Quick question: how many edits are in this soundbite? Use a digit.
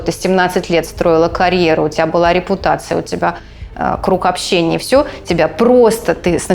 0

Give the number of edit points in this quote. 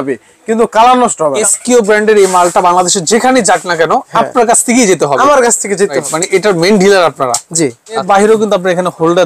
3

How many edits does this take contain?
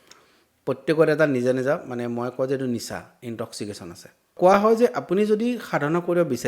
1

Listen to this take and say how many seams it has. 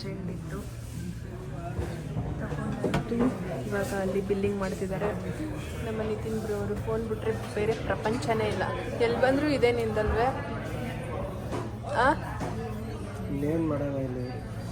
0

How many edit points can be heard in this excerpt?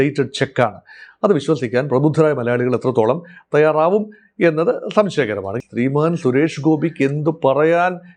1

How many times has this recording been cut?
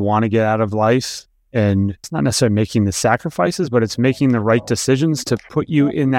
1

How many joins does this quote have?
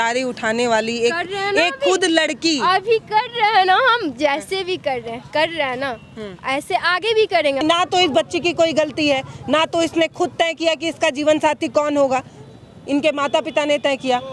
1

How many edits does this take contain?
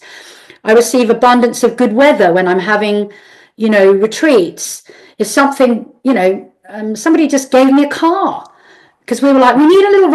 0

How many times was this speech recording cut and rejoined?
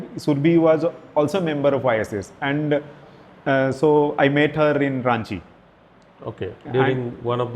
0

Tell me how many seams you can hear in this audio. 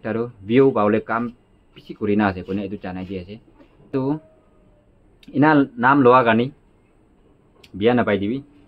1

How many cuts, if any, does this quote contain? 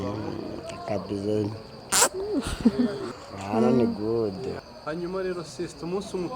1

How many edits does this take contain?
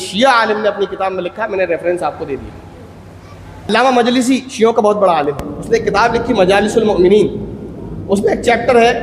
1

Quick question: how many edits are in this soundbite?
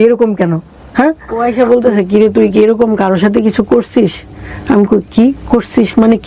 1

